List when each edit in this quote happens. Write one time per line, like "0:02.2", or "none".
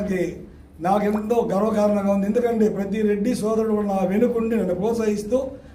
none